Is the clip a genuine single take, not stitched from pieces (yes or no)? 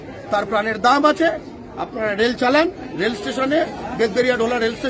no